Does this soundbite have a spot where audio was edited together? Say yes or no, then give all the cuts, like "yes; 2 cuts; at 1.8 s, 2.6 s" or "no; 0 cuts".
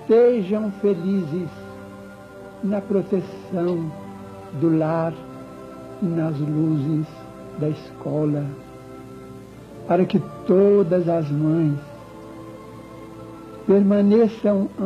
yes; 1 cut; at 1.5 s